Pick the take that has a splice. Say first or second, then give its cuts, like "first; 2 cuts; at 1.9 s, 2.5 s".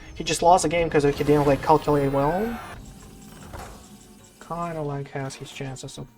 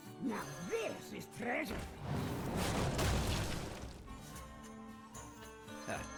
first; 1 cut; at 2.7 s